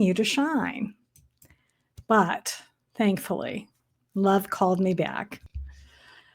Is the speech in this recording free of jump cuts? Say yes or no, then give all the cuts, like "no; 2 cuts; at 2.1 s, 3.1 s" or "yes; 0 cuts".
no; 1 cut; at 5.4 s